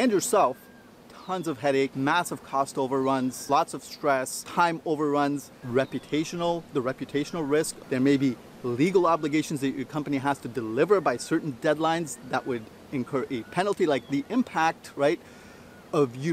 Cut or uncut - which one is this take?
cut